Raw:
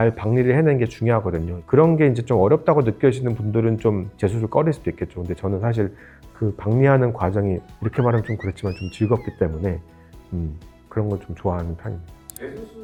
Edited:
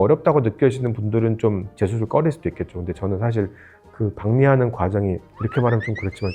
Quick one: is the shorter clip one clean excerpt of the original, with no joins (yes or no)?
yes